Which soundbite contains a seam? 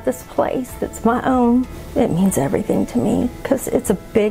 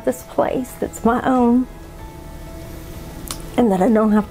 first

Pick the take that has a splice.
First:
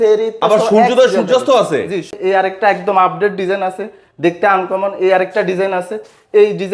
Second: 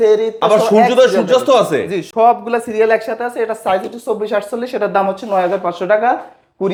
first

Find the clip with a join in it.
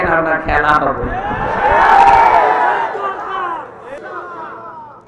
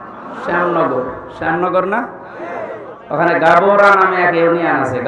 first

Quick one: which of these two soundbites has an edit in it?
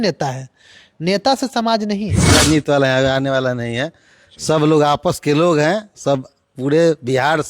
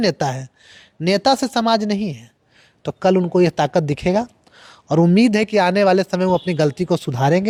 first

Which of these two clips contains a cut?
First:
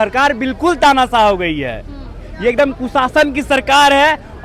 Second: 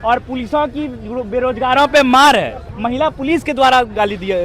second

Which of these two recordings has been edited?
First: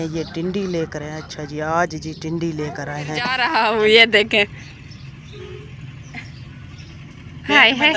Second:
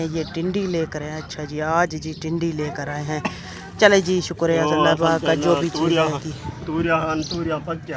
first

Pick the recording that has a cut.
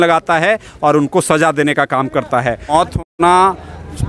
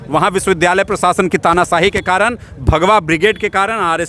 first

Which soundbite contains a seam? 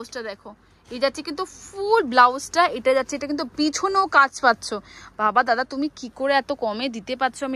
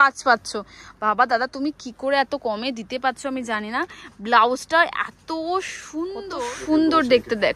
second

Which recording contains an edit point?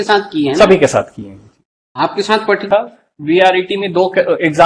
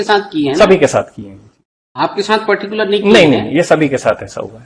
first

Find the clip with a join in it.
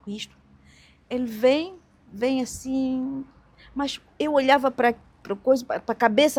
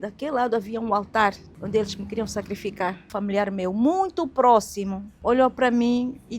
second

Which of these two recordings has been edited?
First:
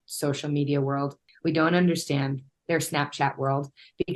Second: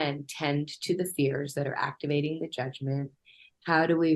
first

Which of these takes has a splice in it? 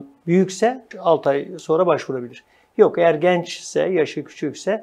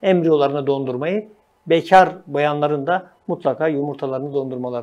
first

